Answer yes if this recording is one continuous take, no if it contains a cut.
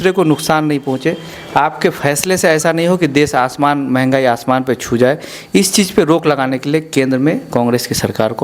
yes